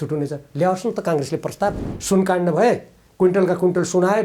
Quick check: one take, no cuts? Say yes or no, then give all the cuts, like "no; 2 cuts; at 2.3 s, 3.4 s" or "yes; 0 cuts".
no; 1 cut; at 1.9 s